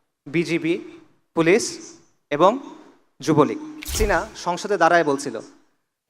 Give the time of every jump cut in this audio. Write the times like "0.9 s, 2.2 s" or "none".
3.9 s